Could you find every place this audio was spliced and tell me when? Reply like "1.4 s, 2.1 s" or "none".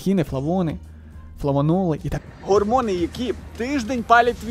2.1 s

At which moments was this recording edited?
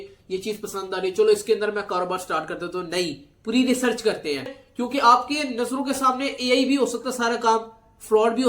4.6 s

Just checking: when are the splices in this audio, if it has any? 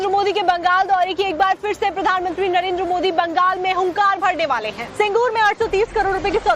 2.0 s

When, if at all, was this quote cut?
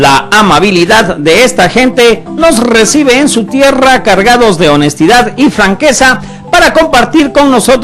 3.5 s

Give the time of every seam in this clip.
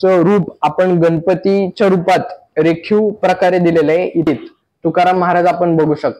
4.3 s

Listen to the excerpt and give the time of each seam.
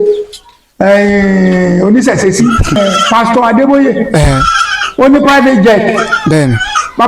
2.8 s

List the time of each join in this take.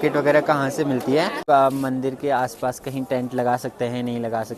1.5 s

